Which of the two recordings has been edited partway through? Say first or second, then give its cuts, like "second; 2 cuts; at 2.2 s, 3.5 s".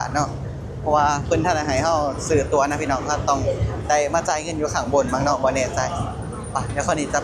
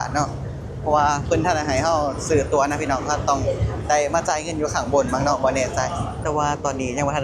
second; 1 cut; at 6.2 s